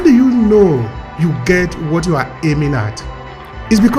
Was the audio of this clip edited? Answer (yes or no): no